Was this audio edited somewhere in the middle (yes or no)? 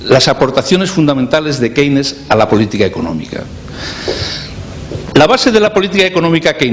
yes